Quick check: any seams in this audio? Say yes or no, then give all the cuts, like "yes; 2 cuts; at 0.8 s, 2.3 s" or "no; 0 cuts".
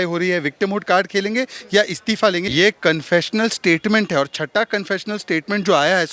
yes; 1 cut; at 2.5 s